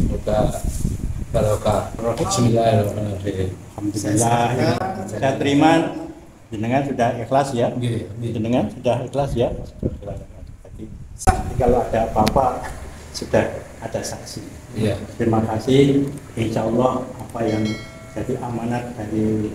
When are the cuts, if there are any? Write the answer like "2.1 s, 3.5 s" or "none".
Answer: 2.0 s